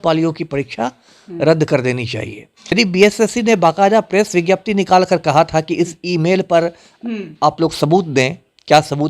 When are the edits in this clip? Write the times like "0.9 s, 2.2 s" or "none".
2.7 s

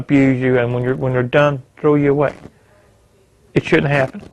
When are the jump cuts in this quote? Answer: none

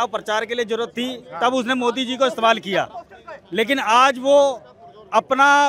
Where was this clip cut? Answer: none

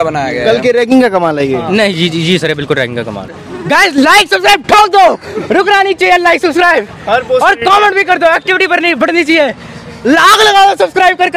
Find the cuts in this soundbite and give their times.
3.4 s

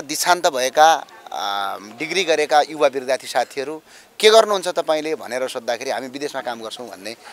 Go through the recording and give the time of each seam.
none

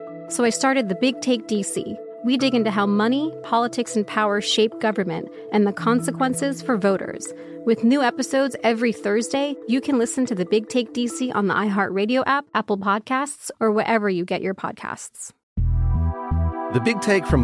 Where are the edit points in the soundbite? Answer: 15.3 s

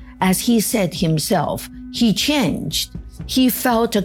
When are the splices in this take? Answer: none

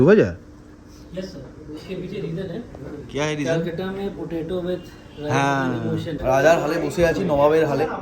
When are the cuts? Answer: 6.2 s

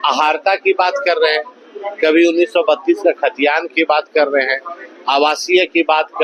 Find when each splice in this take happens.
none

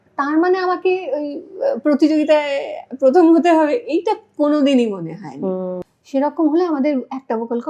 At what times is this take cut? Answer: 5.8 s

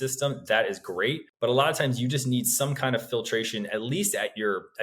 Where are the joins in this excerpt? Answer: 1.3 s

